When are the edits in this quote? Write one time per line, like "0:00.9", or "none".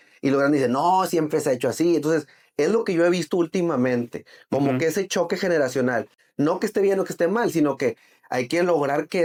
none